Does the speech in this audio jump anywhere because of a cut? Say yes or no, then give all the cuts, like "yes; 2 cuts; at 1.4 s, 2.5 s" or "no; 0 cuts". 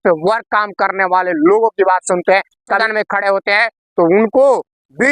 yes; 1 cut; at 2.8 s